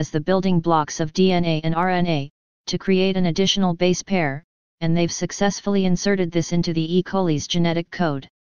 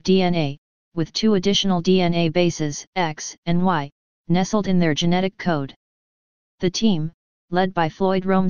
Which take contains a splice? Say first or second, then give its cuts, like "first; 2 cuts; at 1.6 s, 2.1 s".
first; 1 cut; at 7.4 s